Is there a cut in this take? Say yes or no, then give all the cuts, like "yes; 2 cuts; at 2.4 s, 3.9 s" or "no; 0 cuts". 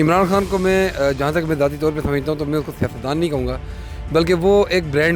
no; 0 cuts